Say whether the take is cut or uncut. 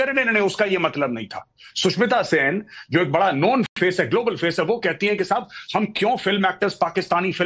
uncut